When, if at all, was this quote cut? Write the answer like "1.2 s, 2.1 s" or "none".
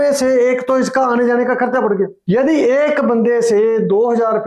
2.2 s